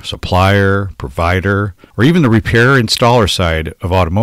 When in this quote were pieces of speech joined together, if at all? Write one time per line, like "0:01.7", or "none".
0:01.8